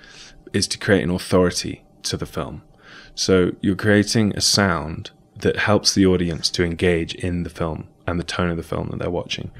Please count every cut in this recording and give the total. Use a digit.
1